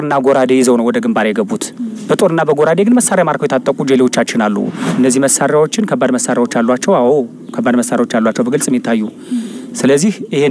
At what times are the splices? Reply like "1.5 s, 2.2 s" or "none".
4.8 s

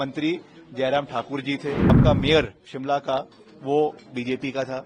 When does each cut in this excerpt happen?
2.0 s

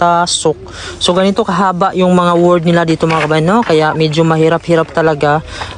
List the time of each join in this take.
none

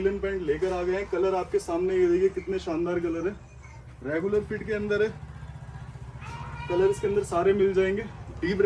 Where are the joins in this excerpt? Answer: none

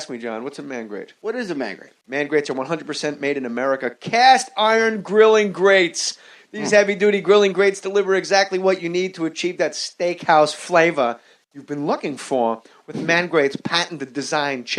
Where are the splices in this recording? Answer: 10.2 s

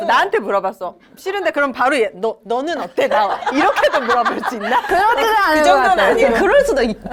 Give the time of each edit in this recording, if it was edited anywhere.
none

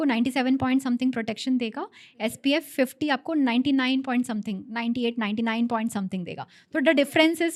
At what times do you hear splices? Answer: none

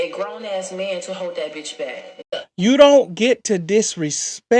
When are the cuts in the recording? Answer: 2.2 s

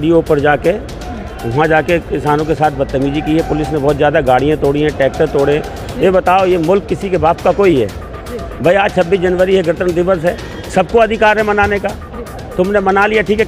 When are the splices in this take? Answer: none

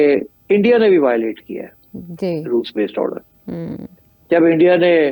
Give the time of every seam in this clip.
none

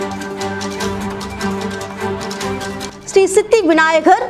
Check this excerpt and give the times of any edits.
2.7 s

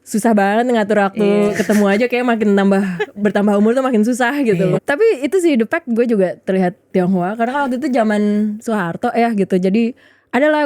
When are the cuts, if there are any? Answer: 4.8 s

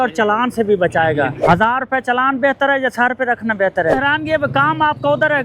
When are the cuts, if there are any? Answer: 1.4 s, 3.9 s

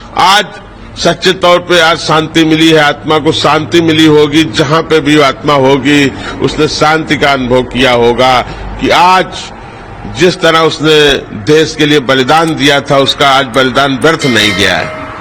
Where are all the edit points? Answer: none

